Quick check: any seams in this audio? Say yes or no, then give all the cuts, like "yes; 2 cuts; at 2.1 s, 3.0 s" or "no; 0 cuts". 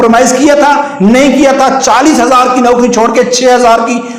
no; 0 cuts